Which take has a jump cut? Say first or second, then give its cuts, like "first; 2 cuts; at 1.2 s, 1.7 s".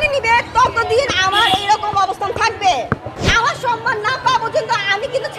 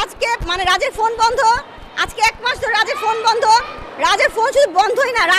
first; 1 cut; at 3.2 s